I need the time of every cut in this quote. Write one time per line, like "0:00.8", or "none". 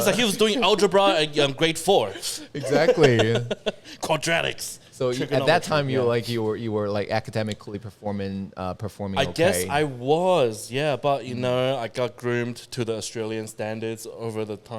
none